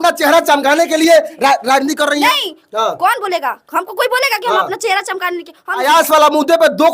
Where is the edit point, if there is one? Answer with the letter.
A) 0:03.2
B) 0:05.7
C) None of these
B